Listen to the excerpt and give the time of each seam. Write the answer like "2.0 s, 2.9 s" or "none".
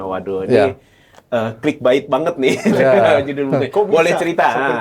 none

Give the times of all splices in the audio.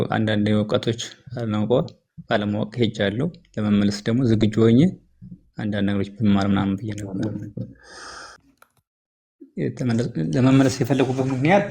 8.5 s

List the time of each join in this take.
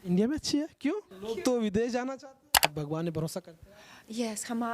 1.1 s, 2.7 s

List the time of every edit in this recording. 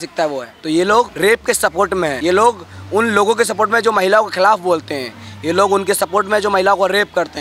0.9 s, 2.2 s

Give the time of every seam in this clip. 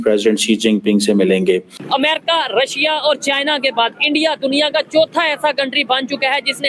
1.7 s

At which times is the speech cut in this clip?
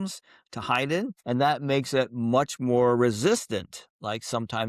1.2 s

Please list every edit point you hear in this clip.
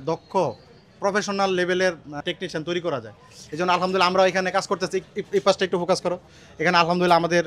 2.2 s

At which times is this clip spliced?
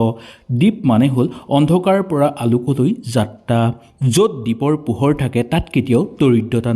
4.0 s

